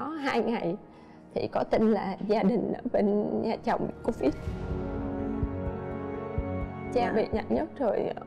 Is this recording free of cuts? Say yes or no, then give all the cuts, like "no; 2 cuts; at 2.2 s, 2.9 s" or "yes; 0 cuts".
yes; 0 cuts